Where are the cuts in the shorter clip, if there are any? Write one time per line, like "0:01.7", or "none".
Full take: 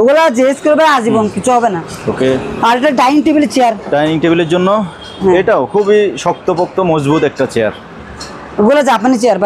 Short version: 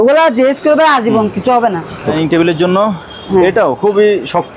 0:02.1